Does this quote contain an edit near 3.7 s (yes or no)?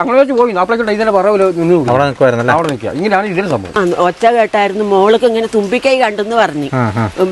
yes